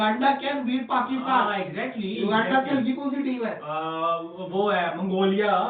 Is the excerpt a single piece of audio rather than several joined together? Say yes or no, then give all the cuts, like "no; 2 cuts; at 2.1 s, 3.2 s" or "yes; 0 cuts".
yes; 0 cuts